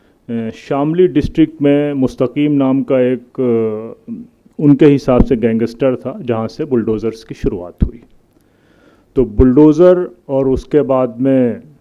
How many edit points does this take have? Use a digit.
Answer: 0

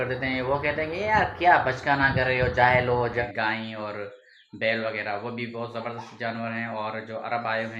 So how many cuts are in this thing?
1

